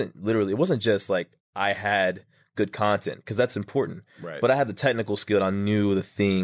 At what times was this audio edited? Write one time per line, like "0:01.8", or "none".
none